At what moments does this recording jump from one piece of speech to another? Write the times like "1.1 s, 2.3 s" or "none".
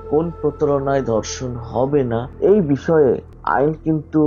2.3 s, 3.3 s